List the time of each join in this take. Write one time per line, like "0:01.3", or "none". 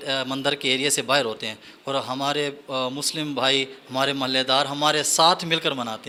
none